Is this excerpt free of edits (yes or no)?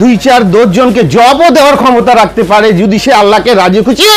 yes